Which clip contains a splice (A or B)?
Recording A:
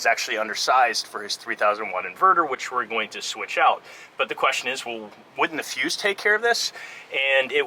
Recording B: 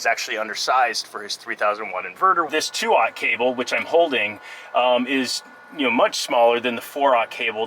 B